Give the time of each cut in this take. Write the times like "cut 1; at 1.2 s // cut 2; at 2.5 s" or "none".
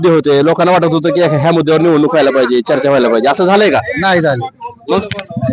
none